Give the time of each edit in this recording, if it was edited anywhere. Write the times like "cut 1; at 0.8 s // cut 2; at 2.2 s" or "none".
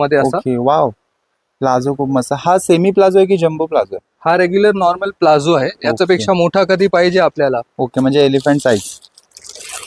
none